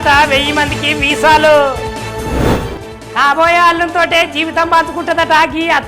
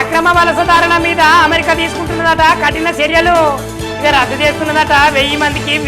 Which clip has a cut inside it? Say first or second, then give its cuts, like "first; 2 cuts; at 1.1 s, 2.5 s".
first; 1 cut; at 2.2 s